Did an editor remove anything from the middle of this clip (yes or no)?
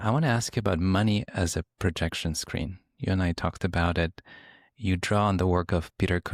no